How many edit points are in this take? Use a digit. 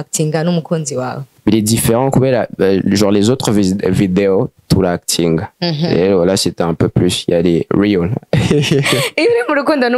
2